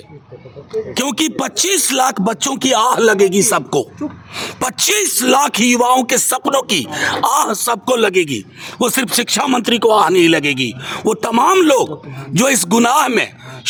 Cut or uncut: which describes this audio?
uncut